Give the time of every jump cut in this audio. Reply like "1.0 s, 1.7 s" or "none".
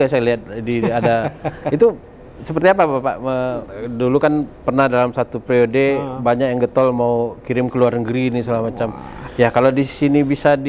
3.7 s

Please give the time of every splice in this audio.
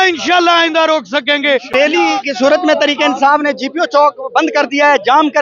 1.7 s

